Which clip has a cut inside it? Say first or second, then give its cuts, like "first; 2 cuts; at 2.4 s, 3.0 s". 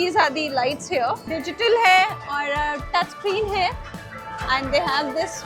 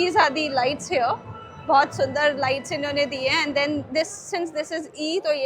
first; 1 cut; at 1.2 s